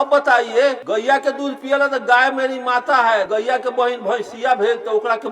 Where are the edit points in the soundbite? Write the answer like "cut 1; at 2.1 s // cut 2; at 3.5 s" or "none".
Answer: cut 1; at 0.8 s // cut 2; at 3.3 s